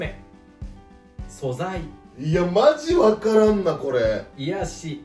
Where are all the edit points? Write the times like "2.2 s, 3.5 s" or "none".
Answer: none